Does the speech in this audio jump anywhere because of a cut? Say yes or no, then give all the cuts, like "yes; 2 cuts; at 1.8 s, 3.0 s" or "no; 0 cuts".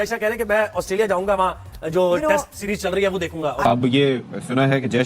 yes; 1 cut; at 3.6 s